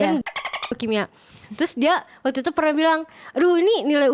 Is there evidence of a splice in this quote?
no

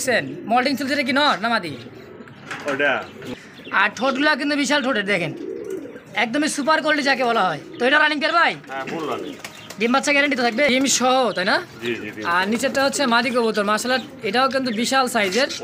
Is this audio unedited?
no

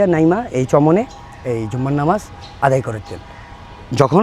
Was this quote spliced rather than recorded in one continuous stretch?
no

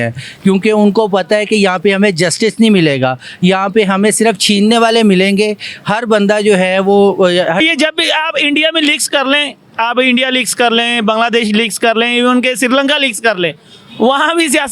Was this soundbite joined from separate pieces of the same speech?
yes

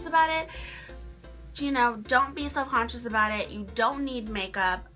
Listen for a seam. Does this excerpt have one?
no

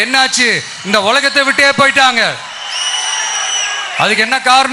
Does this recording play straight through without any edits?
yes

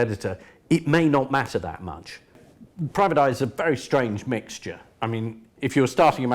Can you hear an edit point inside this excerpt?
yes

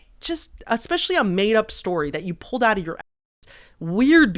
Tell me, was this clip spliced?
no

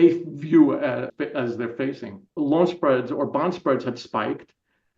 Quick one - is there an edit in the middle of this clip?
yes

